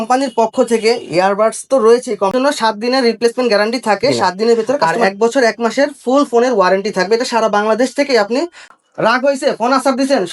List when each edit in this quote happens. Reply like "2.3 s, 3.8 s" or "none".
2.3 s, 4.9 s, 8.6 s